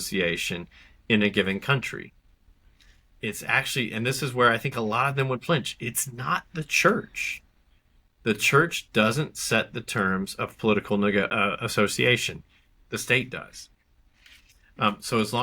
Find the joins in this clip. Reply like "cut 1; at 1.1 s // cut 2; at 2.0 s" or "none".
cut 1; at 11.3 s